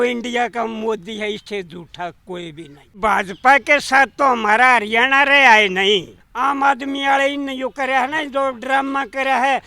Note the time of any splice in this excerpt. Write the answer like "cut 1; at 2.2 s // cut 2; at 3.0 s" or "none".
cut 1; at 2.9 s // cut 2; at 6.2 s